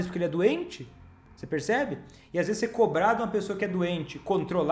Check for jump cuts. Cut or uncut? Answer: uncut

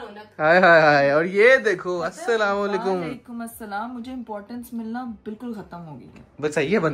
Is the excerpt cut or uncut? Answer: uncut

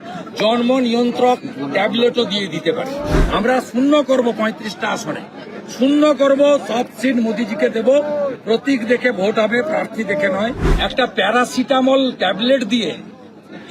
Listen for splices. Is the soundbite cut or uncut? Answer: cut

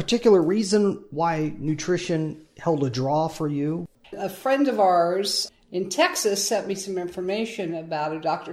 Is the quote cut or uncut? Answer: cut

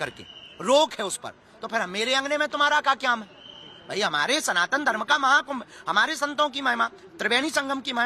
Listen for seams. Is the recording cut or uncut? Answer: uncut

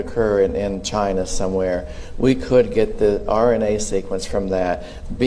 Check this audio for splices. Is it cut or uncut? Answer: uncut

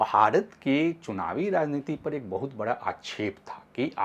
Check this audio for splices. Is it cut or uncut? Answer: uncut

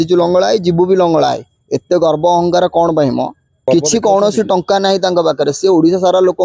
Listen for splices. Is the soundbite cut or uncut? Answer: uncut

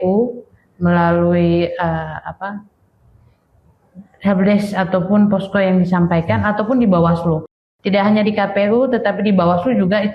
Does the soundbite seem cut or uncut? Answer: uncut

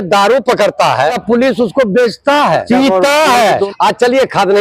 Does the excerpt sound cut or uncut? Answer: cut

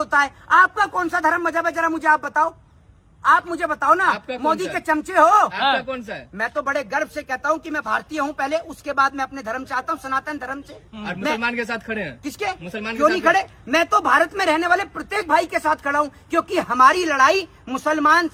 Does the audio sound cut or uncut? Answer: uncut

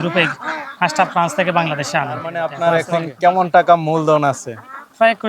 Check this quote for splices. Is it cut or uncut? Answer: cut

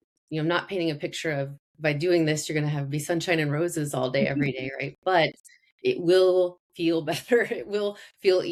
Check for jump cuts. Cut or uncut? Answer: uncut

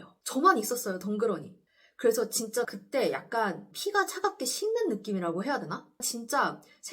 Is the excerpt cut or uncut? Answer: cut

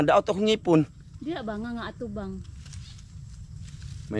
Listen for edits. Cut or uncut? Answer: uncut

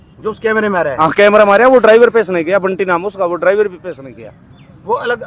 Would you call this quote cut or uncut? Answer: uncut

